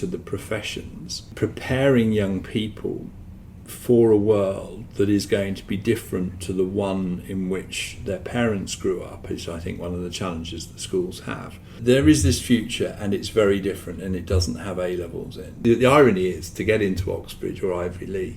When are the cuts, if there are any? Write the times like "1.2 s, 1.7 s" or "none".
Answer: 1.3 s, 11.8 s, 15.5 s